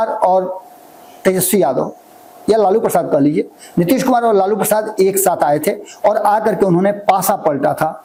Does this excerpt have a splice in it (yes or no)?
no